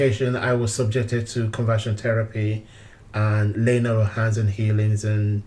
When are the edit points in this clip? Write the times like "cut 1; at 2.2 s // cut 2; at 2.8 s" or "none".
none